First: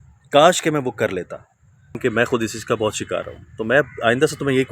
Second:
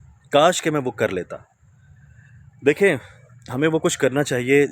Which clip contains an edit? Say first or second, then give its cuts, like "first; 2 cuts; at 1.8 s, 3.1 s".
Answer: first; 1 cut; at 2.0 s